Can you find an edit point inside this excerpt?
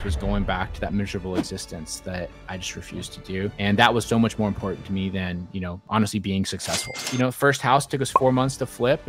yes; 3 cuts; at 3.5 s, 5.8 s, 7.1 s

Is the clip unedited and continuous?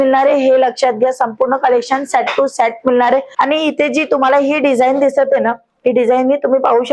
no; 1 cut; at 3.3 s

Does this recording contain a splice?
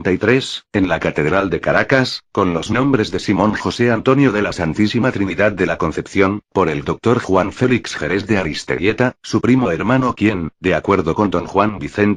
no; 0 cuts

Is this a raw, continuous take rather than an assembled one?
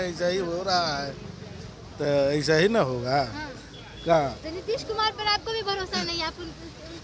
yes; 0 cuts

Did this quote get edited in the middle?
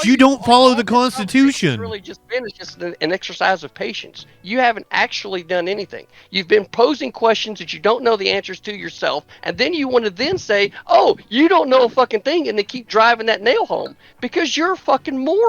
no; 0 cuts

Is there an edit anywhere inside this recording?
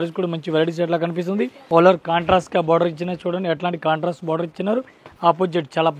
yes; 1 cut; at 1.6 s

